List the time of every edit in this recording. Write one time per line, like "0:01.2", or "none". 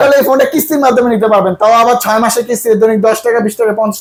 none